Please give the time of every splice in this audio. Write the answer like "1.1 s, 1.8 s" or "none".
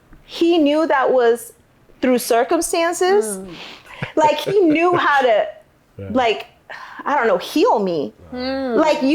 3.8 s